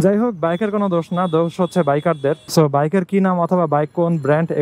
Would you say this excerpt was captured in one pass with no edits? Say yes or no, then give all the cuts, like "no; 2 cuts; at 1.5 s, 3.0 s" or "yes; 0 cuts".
no; 1 cut; at 2.4 s